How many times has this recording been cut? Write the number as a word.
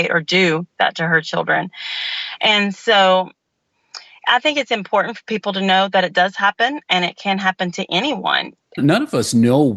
one